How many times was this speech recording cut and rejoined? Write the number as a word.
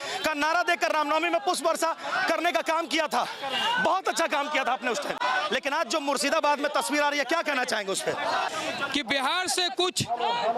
one